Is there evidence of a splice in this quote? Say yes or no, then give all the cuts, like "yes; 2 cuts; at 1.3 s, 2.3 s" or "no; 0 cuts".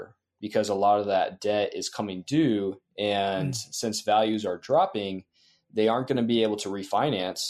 no; 0 cuts